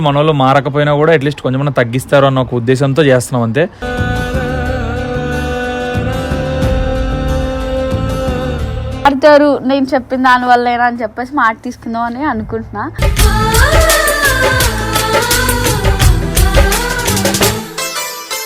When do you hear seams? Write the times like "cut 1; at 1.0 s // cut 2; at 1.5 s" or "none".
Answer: cut 1; at 9.0 s